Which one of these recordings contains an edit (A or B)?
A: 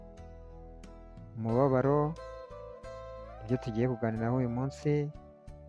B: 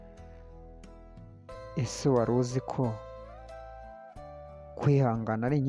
B